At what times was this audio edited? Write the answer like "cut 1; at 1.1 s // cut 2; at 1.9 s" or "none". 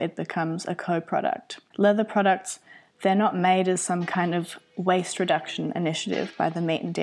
cut 1; at 1.6 s